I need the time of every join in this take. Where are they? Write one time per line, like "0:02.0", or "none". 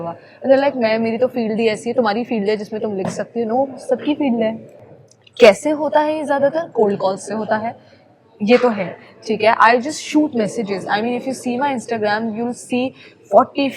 0:04.7